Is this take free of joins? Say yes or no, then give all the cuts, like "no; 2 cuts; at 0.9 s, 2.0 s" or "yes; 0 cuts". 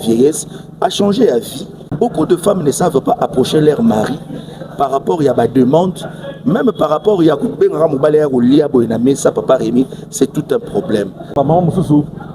no; 2 cuts; at 1.9 s, 11.3 s